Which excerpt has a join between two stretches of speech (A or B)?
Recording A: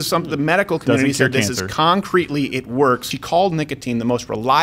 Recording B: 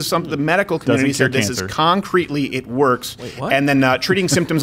A